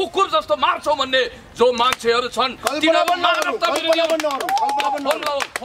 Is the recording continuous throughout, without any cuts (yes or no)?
yes